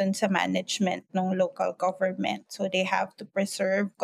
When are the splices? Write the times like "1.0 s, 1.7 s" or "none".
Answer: none